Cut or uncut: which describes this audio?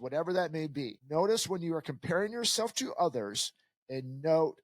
cut